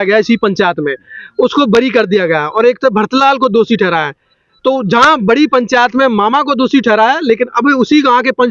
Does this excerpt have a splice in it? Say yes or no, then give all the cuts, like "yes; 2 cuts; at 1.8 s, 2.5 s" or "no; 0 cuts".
no; 0 cuts